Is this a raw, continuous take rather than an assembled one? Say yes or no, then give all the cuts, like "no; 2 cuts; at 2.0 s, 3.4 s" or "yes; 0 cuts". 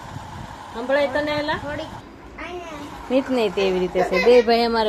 no; 1 cut; at 2.0 s